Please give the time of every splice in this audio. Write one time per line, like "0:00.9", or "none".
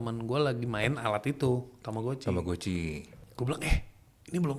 0:03.2

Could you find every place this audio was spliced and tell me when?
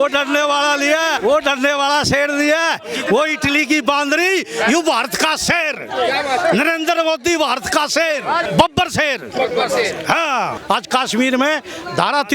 0:01.2
0:08.4
0:10.6

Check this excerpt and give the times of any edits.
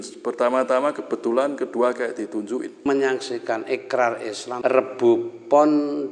0:02.9
0:04.5

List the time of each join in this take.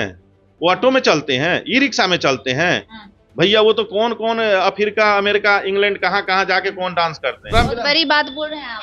0:07.5

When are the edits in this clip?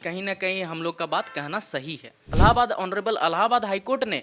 0:02.4

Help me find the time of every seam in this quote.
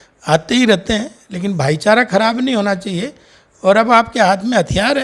none

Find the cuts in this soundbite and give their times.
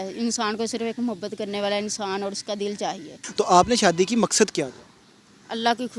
0:03.2

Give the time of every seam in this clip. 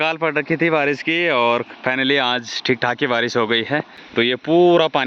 0:04.0

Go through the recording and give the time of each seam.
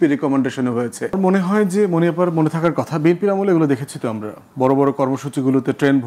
0:01.2

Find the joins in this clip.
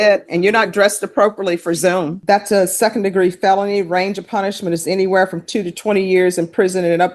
0:02.2

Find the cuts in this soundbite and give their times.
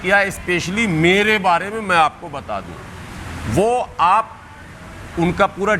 none

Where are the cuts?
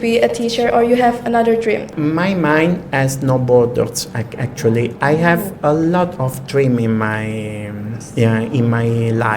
0:01.9

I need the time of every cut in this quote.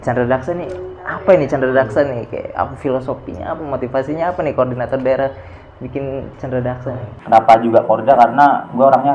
0:07.0

